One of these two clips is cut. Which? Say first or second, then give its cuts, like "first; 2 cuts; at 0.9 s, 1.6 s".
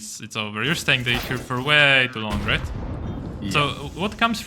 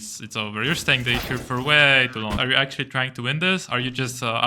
second; 1 cut; at 2.4 s